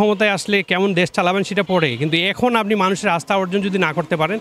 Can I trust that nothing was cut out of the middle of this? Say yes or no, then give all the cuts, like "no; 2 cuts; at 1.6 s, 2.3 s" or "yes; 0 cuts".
yes; 0 cuts